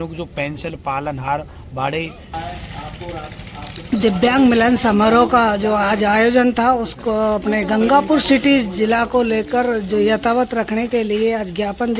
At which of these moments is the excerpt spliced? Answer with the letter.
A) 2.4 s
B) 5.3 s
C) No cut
A